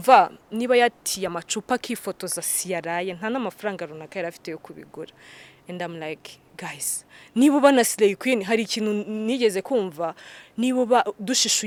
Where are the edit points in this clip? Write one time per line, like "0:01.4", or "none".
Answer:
none